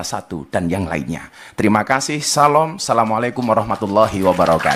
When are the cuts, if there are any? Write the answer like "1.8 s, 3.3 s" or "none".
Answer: none